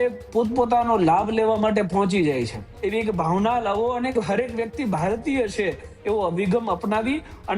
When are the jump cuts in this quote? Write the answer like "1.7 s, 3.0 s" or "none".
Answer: 2.7 s